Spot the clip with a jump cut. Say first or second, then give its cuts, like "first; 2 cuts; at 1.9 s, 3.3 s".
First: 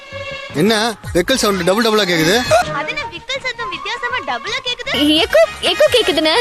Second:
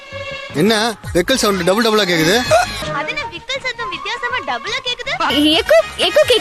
first; 2 cuts; at 2.6 s, 4.9 s